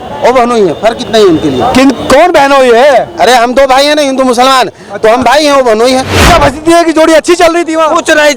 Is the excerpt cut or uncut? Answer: cut